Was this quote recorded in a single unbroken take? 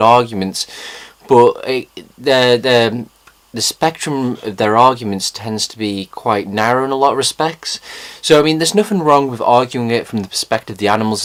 yes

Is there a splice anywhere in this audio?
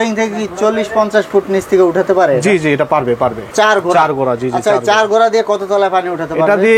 yes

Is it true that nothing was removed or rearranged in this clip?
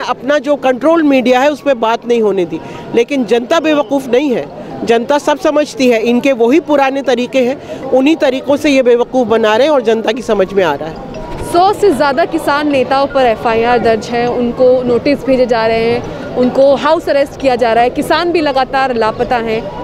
yes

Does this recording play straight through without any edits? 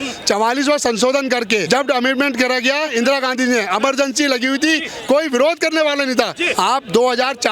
no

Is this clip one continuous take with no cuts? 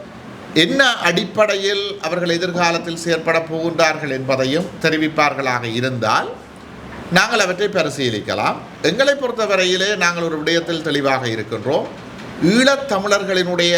yes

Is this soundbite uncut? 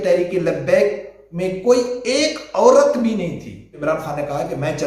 no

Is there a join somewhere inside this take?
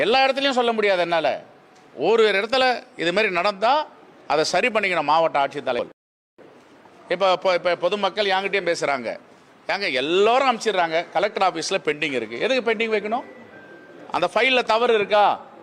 yes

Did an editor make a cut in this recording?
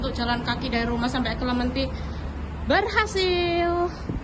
no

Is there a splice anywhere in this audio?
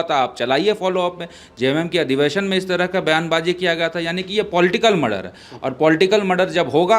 no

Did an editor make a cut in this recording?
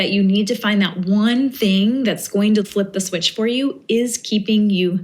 yes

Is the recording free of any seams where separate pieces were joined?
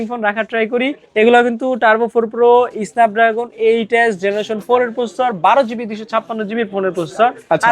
yes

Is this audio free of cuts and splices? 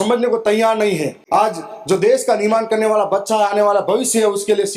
no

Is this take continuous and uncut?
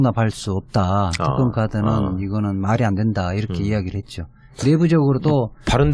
no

